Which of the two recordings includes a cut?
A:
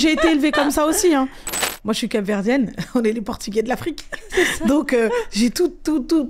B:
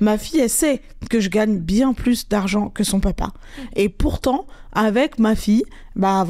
A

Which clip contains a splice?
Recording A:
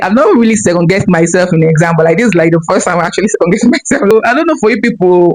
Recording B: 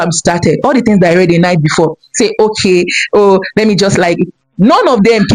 A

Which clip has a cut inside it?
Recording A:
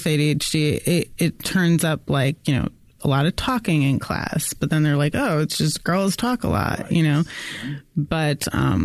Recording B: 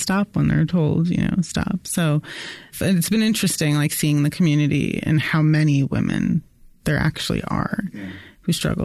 B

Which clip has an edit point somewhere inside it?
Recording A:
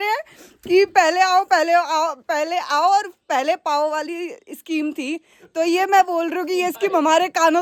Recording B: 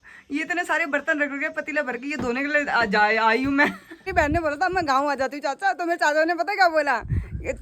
B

